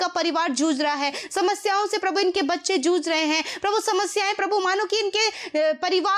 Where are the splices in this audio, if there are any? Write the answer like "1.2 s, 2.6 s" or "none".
none